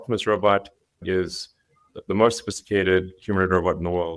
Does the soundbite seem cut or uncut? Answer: uncut